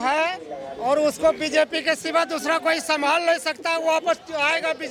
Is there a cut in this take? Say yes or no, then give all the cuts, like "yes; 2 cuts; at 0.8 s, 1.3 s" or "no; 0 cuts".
no; 0 cuts